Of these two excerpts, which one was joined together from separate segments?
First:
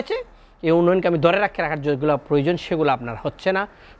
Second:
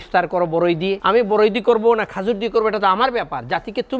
second; 1 cut; at 1.0 s

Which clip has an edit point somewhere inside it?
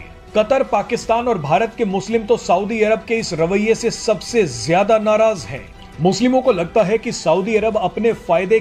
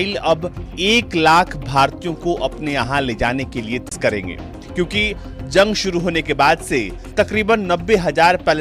second; 1 cut; at 3.9 s

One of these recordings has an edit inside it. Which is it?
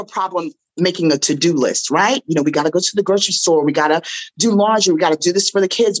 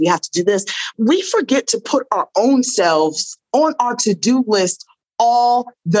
second; 1 cut; at 0.9 s

